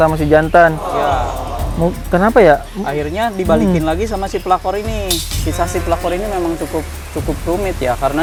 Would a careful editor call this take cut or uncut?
uncut